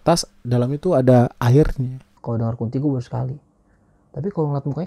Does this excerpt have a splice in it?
yes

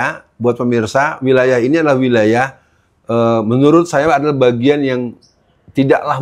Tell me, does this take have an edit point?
no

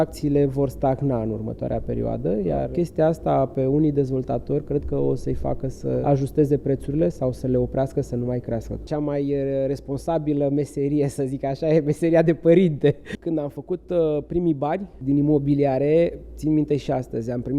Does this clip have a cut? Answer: yes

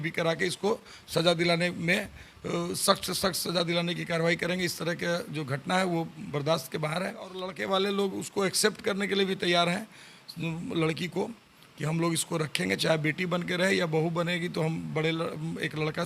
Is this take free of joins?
no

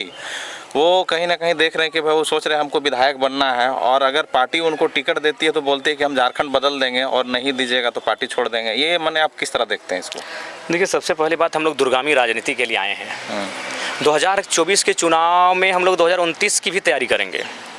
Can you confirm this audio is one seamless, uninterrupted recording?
yes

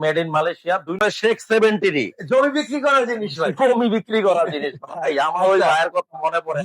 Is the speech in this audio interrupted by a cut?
yes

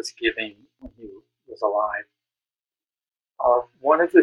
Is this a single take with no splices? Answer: yes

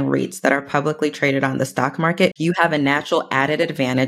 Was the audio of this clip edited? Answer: yes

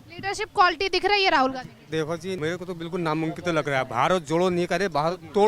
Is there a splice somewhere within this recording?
yes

